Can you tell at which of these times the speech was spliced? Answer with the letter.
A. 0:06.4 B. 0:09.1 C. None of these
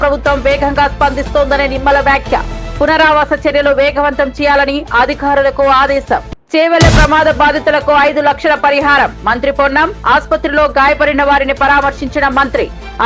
A